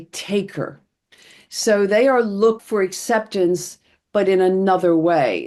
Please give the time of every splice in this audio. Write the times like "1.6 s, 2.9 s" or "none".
2.6 s

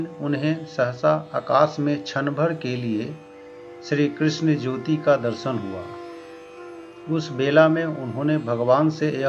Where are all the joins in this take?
none

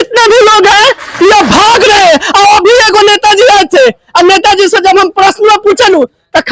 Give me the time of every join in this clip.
none

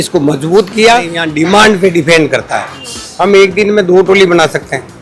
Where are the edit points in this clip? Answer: 1.2 s

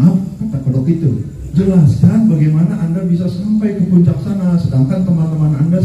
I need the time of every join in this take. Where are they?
1.4 s

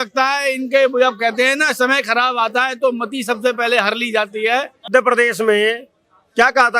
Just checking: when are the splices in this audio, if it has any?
4.9 s

